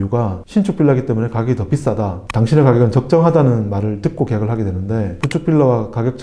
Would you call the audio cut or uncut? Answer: cut